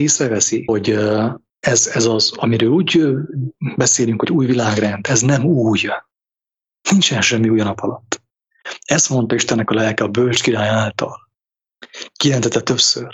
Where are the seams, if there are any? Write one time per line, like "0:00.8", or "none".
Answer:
0:00.7
0:01.5